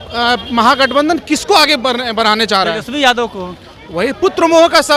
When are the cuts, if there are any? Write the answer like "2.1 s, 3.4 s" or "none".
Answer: none